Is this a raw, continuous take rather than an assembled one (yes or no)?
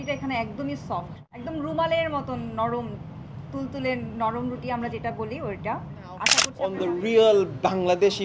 no